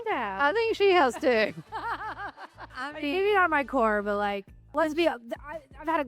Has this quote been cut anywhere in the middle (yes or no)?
yes